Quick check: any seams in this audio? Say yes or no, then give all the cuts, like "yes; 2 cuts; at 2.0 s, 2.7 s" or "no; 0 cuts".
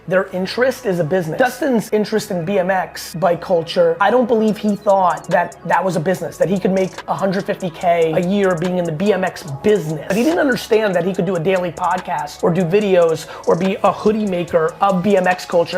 yes; 7 cuts; at 1.6 s, 3.0 s, 4.0 s, 5.2 s, 8.1 s, 10.0 s, 12.3 s